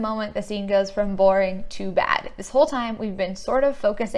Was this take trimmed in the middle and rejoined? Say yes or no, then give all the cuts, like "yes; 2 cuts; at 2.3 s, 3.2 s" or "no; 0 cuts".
no; 0 cuts